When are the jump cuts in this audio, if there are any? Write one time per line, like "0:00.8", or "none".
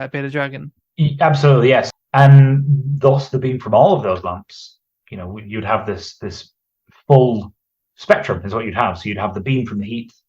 0:01.9